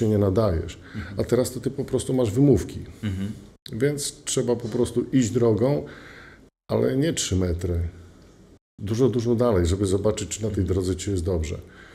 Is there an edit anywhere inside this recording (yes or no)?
no